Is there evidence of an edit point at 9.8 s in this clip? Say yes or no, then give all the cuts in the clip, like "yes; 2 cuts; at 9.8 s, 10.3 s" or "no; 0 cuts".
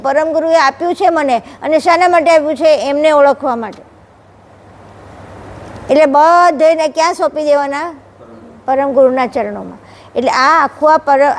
no; 0 cuts